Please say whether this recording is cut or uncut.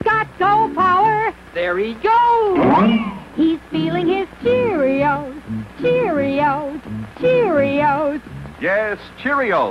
cut